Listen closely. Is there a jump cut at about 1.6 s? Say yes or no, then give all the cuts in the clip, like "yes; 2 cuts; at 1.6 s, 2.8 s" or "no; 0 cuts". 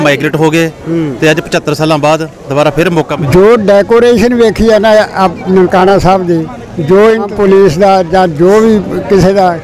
no; 2 cuts; at 3.1 s, 7.3 s